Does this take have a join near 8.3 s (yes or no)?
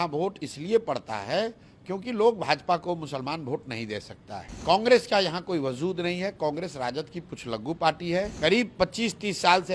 yes